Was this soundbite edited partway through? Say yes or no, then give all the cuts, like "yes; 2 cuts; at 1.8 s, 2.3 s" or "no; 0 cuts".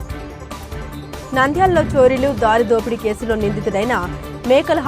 yes; 1 cut; at 1.3 s